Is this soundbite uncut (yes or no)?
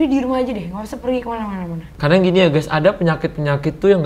no